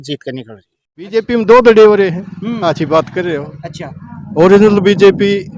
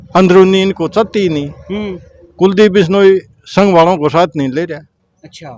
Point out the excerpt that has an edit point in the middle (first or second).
first